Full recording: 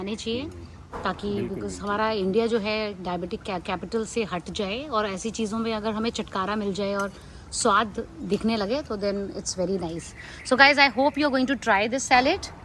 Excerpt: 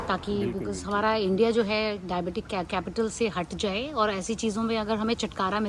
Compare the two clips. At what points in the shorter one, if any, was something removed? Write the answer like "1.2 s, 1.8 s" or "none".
none